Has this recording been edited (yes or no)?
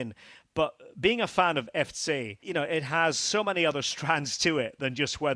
yes